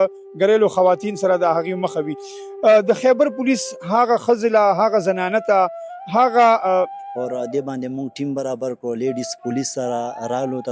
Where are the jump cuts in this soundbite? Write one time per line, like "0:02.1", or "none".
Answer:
0:07.0